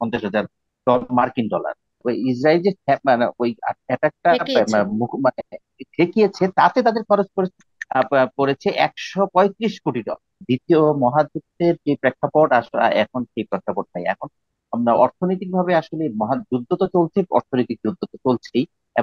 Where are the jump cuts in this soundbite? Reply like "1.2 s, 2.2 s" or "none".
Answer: 2.0 s, 10.4 s